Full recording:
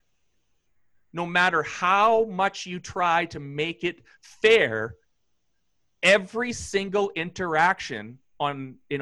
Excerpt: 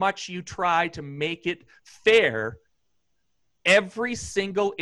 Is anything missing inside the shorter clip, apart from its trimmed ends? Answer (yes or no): no